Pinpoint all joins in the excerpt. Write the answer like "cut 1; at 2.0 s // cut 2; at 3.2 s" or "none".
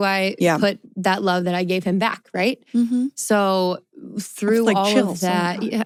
none